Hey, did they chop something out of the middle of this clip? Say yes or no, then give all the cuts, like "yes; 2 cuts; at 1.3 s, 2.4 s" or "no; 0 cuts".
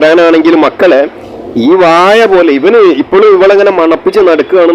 no; 0 cuts